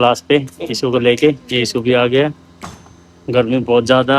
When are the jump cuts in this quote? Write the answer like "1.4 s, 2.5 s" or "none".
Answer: none